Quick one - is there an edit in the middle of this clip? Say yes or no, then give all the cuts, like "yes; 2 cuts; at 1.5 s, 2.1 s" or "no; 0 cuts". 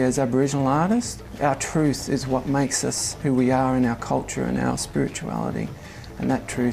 yes; 2 cuts; at 1.2 s, 3.1 s